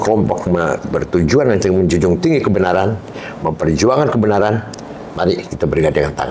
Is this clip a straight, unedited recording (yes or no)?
yes